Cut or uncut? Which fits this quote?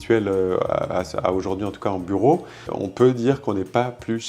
cut